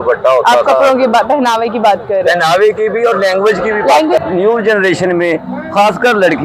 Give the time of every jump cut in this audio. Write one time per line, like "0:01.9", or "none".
0:04.2